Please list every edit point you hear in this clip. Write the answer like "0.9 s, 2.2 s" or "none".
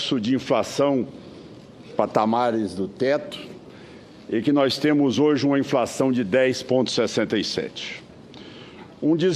7.7 s